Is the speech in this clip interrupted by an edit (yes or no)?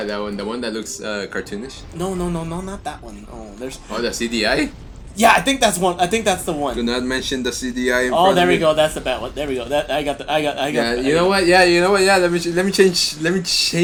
no